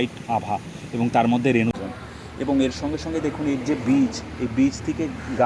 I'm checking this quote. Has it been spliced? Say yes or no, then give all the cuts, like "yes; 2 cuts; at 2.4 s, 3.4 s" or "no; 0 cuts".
yes; 1 cut; at 1.8 s